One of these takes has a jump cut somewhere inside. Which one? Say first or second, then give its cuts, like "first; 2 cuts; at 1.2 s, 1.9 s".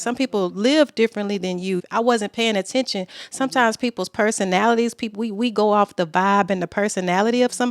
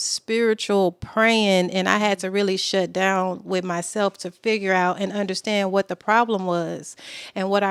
first; 1 cut; at 1.8 s